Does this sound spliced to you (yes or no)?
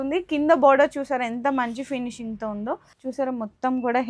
yes